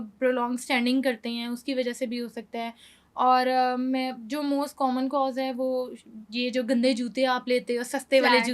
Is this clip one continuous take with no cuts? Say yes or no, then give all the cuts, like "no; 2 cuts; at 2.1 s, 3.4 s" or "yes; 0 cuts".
yes; 0 cuts